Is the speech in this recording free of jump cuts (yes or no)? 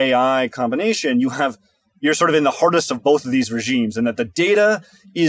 yes